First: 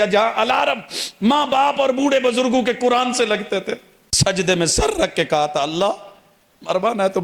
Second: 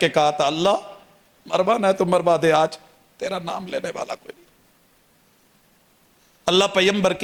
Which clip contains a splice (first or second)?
first